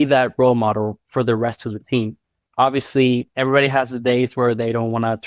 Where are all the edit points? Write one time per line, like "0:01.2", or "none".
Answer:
0:02.4
0:03.3

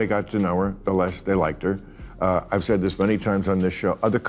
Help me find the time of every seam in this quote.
0:02.0

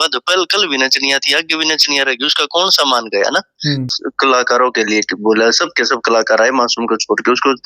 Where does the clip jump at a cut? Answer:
0:04.0

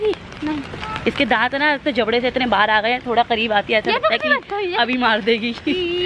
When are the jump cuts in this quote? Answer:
none

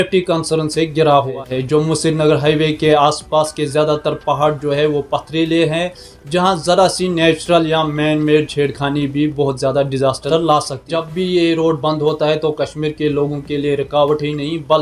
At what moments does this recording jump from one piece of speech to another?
0:01.3
0:11.0

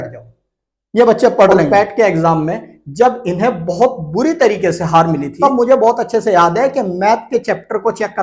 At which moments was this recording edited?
0:01.7
0:05.3

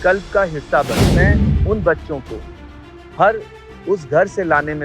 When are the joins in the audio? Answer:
0:01.1

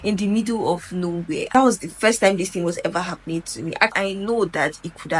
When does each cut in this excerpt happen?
0:01.4
0:03.9

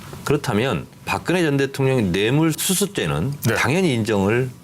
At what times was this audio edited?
0:01.4

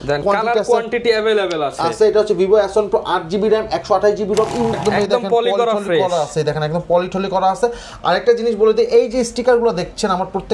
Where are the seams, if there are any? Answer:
0:04.8

